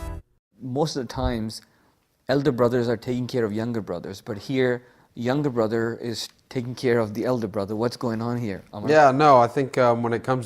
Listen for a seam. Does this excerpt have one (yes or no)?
yes